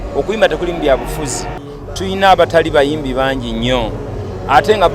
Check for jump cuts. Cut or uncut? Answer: cut